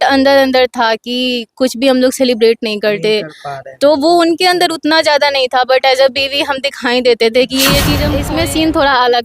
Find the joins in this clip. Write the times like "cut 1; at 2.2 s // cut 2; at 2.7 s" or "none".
cut 1; at 8.1 s